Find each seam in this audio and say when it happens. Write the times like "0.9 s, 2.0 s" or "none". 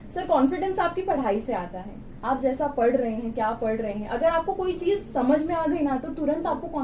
none